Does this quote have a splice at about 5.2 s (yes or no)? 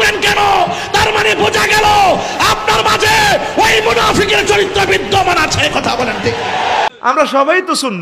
no